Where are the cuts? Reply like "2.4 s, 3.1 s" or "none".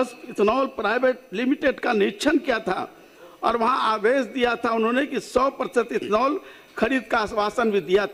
none